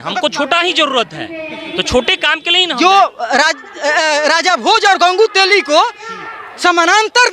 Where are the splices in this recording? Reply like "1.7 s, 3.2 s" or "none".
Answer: 2.7 s